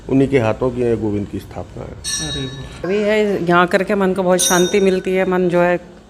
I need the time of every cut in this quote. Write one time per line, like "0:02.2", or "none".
0:02.8

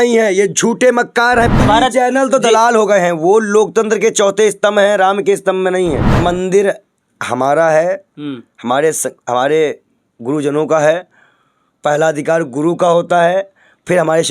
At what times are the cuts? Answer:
0:01.6
0:06.1

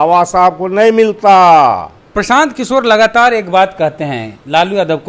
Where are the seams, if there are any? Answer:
0:02.0

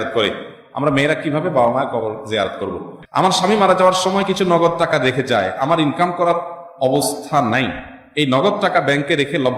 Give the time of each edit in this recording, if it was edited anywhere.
0:03.0

